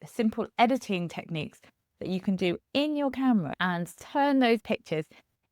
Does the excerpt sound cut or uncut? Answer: cut